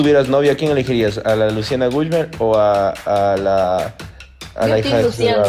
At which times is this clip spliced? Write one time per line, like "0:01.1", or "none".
none